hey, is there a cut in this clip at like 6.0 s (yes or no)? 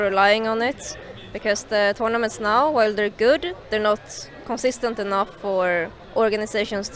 yes